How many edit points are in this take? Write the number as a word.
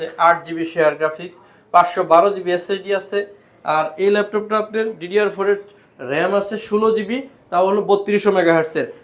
zero